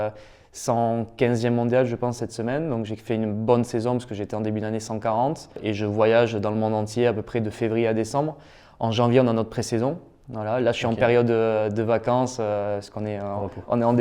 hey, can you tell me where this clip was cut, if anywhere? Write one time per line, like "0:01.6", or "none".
0:05.6